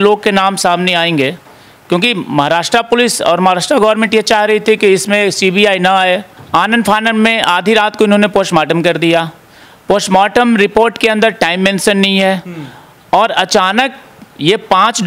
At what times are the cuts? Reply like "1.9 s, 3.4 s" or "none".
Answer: 6.3 s